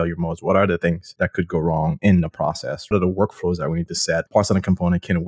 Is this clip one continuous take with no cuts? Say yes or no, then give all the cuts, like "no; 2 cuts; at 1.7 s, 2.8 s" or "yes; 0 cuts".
no; 3 cuts; at 1.1 s, 2.9 s, 4.3 s